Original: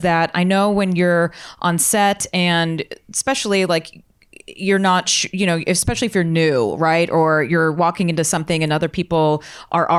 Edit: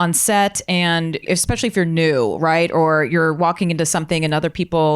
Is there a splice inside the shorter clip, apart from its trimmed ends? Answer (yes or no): yes